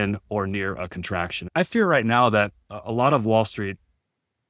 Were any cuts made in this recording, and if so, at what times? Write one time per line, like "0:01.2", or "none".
0:01.4